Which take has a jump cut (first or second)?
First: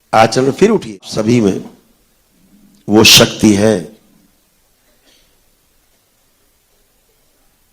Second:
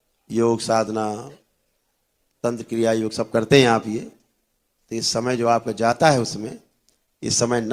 first